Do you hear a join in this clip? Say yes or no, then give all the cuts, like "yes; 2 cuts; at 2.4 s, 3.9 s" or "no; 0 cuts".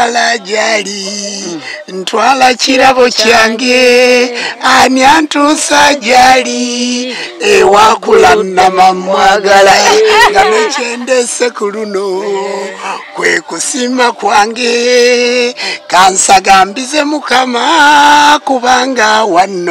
no; 0 cuts